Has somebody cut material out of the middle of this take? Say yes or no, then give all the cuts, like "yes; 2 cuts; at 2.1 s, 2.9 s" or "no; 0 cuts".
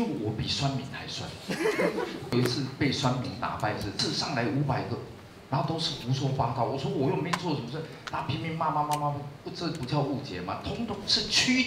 yes; 2 cuts; at 2.3 s, 4.0 s